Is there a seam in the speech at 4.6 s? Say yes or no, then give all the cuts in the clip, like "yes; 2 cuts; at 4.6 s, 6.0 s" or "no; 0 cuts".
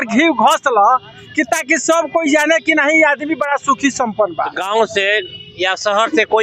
yes; 1 cut; at 4.6 s